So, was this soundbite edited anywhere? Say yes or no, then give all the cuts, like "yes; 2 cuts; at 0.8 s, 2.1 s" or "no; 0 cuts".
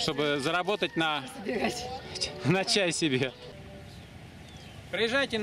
yes; 1 cut; at 3.5 s